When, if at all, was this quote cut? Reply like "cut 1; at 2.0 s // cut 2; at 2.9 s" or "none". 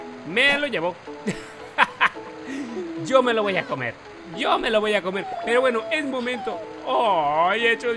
none